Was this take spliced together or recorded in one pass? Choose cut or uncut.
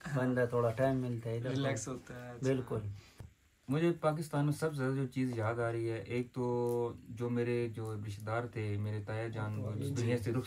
uncut